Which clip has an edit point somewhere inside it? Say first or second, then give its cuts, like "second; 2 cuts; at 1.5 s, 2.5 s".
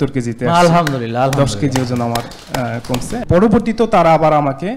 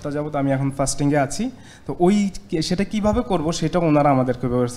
first; 1 cut; at 3.1 s